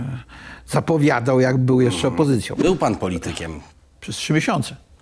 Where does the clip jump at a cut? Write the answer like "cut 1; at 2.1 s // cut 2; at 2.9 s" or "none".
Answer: cut 1; at 2.6 s